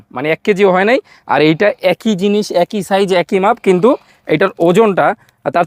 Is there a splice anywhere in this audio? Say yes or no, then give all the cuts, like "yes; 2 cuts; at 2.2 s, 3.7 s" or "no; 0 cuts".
no; 0 cuts